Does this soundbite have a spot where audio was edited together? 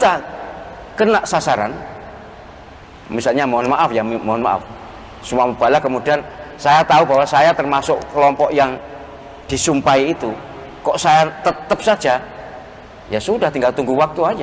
no; 0 cuts

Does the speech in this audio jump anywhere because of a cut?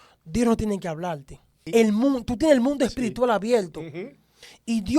yes; 1 cut; at 1.5 s

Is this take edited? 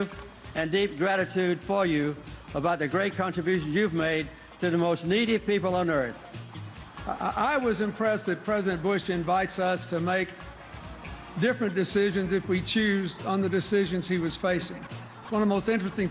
yes; 1 cut; at 7.8 s

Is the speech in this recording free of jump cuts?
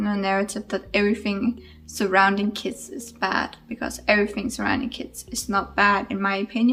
yes; 0 cuts

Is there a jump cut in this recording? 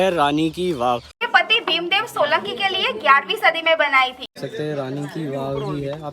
yes; 2 cuts; at 1.1 s, 4.4 s

